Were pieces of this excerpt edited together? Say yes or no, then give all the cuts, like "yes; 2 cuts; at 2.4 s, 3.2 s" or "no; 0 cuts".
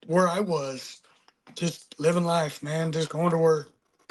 no; 0 cuts